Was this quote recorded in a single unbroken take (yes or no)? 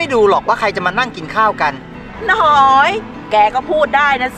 yes